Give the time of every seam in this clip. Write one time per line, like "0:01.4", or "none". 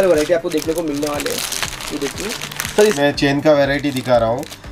0:03.0